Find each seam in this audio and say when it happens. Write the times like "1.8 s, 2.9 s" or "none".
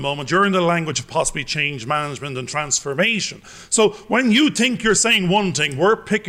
none